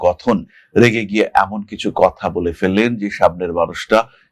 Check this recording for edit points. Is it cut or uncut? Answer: uncut